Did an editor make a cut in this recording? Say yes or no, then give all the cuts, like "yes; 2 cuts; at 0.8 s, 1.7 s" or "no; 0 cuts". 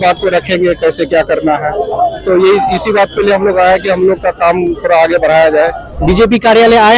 yes; 1 cut; at 5.9 s